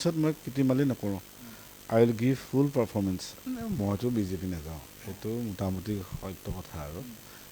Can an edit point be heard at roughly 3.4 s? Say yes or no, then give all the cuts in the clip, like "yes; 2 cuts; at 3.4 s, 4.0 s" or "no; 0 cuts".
yes; 1 cut; at 3.4 s